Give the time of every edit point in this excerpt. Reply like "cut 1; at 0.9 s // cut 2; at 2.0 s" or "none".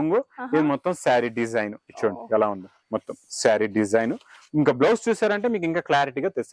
none